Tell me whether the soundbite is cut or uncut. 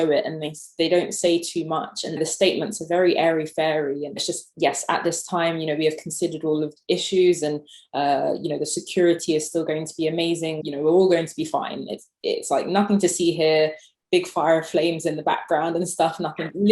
cut